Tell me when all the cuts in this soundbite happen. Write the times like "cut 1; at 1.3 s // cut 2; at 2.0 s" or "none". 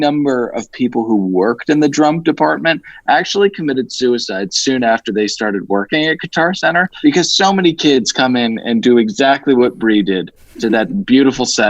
none